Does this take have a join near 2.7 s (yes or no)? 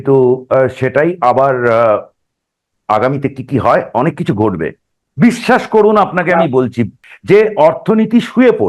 no